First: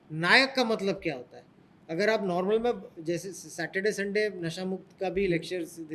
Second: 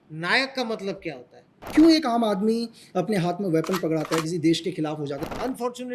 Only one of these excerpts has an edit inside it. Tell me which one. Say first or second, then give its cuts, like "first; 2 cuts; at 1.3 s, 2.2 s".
second; 2 cuts; at 1.5 s, 5.2 s